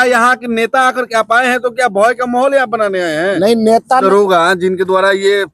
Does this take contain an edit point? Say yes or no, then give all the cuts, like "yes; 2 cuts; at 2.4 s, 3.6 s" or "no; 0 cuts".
yes; 1 cut; at 4.0 s